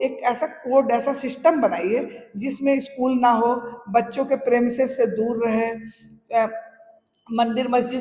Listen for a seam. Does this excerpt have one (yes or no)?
no